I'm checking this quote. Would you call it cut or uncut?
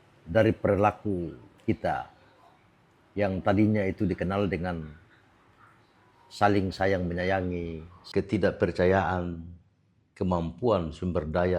uncut